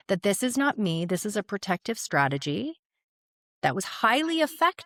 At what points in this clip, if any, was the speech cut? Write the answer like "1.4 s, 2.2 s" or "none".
none